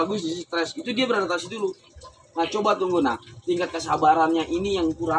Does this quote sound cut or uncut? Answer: uncut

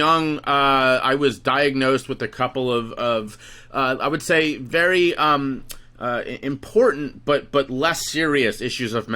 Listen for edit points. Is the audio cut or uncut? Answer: uncut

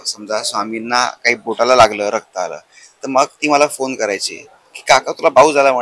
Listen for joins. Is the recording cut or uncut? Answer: uncut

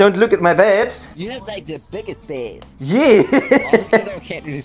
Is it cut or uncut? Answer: cut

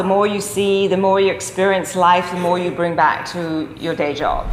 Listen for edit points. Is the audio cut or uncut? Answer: uncut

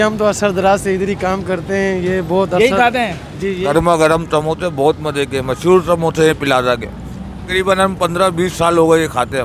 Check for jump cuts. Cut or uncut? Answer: cut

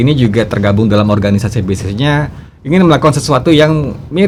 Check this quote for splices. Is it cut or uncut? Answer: uncut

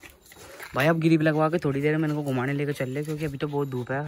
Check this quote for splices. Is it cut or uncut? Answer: uncut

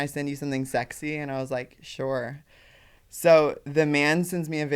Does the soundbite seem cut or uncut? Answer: uncut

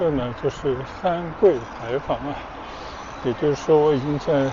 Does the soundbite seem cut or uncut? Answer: uncut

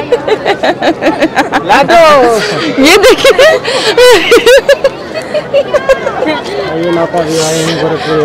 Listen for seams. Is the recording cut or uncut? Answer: uncut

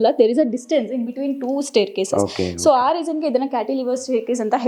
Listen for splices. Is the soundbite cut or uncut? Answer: uncut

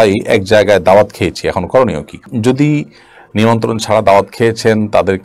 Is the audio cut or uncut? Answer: uncut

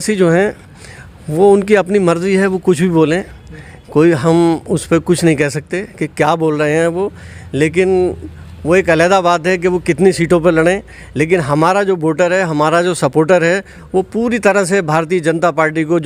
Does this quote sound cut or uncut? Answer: uncut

